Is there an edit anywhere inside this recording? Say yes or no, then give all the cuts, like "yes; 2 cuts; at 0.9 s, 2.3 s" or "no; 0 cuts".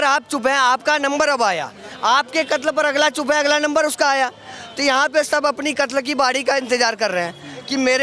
no; 0 cuts